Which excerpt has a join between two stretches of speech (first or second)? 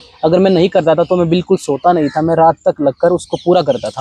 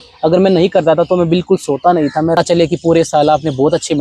second